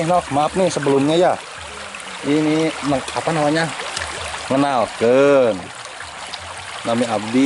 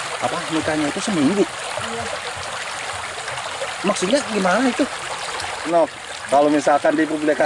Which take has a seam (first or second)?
second